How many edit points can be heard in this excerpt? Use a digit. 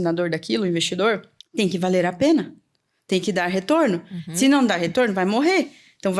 1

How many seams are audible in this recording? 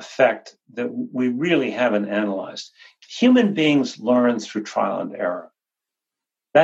1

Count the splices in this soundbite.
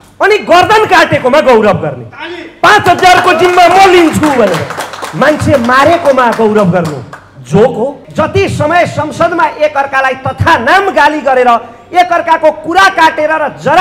1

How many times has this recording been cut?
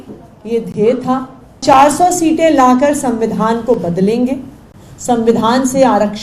1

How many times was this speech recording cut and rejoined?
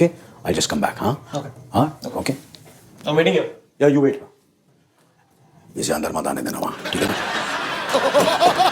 0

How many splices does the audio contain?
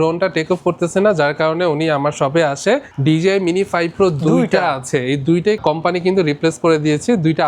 2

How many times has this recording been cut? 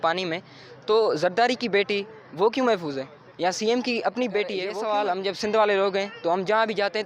1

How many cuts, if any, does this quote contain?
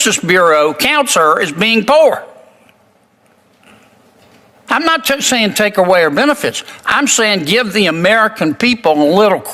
0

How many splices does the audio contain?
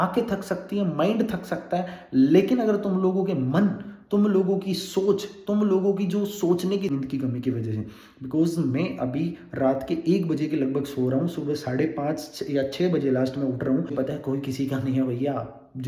2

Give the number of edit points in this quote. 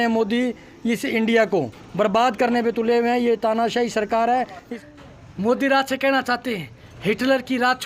1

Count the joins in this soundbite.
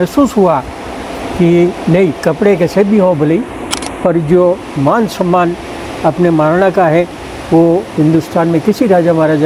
0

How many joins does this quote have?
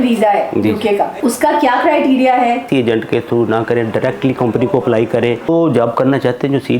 3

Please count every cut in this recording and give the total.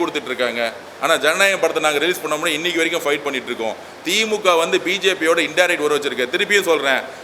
0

